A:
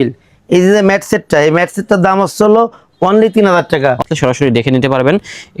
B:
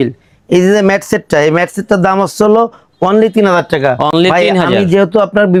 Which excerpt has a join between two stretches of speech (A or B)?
A